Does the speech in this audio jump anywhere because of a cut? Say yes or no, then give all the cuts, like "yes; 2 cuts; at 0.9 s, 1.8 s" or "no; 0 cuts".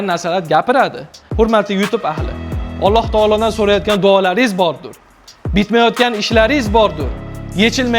yes; 1 cut; at 1.2 s